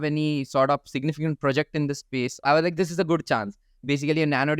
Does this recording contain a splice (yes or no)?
yes